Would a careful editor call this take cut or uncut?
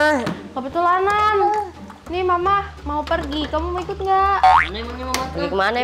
uncut